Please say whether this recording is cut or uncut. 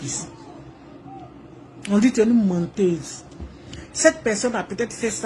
uncut